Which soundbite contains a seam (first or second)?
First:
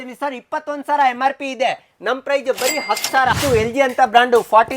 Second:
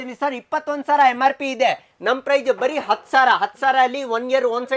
first